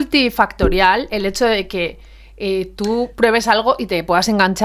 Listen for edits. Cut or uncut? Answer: uncut